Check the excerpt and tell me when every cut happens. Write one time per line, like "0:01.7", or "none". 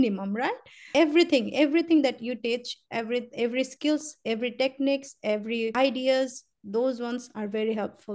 0:00.9
0:05.7